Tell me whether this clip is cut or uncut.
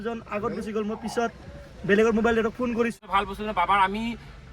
cut